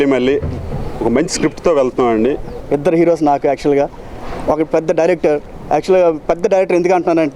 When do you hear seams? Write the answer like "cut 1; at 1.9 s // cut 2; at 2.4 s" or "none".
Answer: cut 1; at 2.5 s